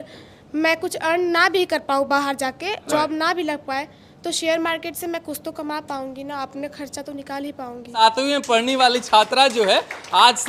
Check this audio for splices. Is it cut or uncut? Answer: cut